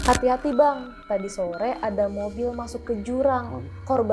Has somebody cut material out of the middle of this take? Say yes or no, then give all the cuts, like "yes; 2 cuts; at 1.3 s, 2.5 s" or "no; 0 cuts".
no; 0 cuts